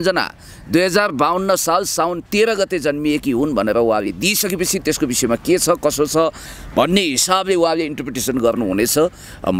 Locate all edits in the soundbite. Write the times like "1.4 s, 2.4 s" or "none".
none